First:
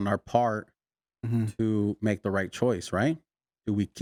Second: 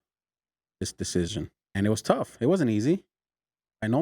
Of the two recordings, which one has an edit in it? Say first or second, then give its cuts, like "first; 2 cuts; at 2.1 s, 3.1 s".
second; 1 cut; at 1.6 s